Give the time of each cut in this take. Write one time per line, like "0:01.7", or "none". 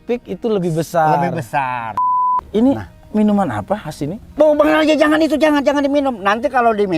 0:02.1